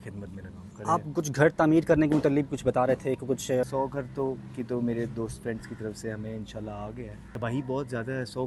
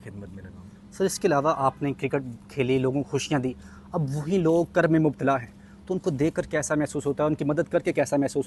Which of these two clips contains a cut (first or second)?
first